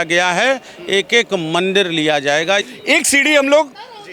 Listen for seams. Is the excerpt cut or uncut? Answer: cut